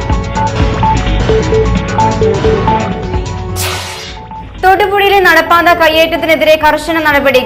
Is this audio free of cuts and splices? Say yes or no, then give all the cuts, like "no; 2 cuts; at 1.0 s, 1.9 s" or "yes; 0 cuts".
yes; 0 cuts